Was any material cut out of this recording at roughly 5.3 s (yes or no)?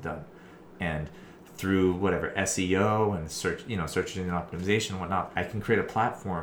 yes